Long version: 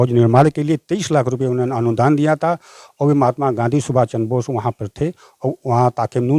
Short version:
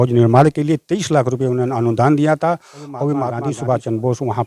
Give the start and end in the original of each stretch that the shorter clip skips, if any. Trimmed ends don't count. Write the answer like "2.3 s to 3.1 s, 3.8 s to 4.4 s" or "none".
3.4 s to 3.6 s